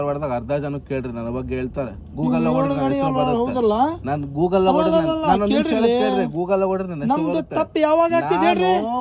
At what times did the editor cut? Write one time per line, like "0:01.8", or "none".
none